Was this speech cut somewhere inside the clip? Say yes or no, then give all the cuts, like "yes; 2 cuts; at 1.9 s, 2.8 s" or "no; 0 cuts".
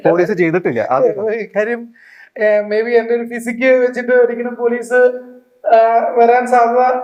no; 0 cuts